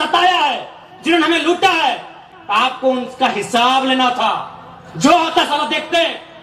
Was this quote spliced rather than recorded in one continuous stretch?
no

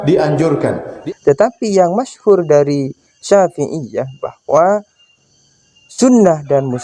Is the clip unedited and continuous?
no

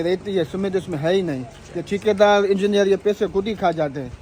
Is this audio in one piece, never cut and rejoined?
yes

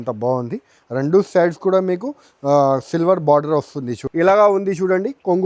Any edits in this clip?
yes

